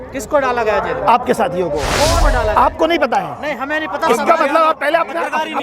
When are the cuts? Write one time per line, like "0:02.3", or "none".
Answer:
0:02.2